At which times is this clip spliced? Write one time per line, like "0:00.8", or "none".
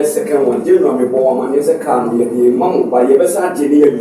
none